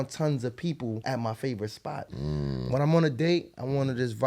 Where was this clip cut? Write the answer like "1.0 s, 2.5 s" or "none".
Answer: 1.0 s, 2.1 s